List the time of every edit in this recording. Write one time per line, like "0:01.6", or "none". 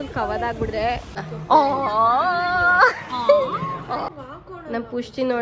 0:01.2
0:04.0